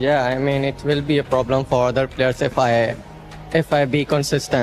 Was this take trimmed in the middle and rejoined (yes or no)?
no